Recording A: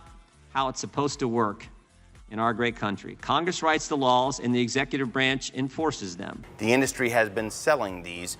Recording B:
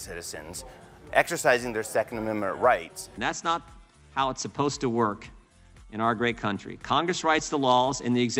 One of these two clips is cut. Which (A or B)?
A